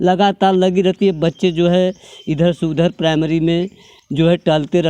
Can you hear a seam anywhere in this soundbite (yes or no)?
no